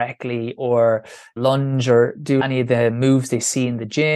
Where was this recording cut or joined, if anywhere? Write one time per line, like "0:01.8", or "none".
0:01.4
0:02.4